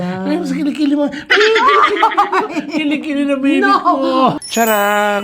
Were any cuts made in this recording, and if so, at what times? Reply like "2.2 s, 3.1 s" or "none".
4.4 s